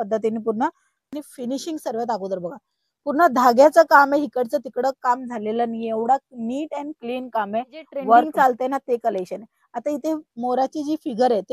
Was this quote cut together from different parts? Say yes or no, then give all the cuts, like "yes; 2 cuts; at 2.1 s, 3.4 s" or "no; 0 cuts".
yes; 2 cuts; at 1.1 s, 8.3 s